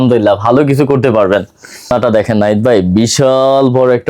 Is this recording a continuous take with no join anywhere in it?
no; 1 cut; at 1.9 s

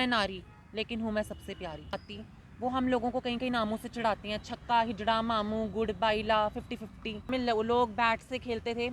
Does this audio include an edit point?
yes; 2 cuts; at 1.9 s, 7.3 s

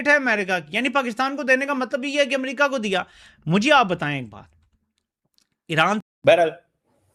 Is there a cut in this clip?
yes; 1 cut; at 6.0 s

